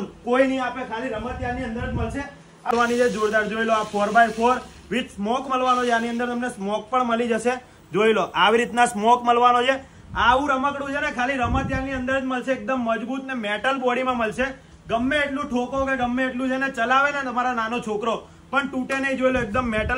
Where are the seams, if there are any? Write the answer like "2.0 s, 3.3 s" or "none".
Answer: 2.7 s